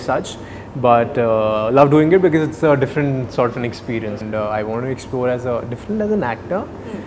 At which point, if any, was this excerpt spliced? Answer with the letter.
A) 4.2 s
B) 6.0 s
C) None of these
A